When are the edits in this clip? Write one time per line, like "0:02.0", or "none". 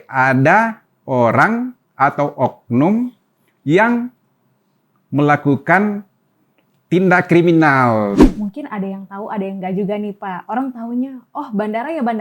0:08.3